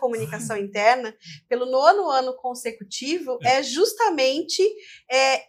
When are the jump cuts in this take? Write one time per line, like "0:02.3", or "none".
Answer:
none